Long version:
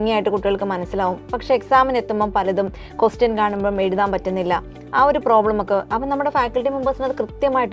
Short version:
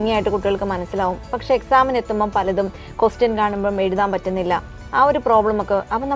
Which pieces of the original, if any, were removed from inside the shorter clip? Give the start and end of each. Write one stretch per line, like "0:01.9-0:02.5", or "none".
none